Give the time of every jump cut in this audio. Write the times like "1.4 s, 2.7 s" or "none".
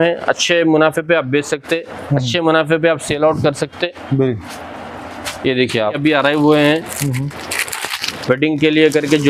6.0 s